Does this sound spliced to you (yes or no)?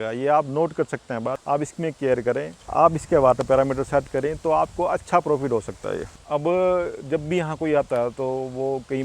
no